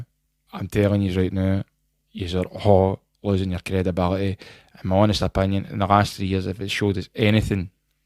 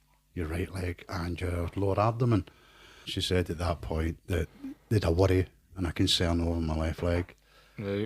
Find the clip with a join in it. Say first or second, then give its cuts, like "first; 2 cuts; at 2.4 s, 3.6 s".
second; 1 cut; at 3.1 s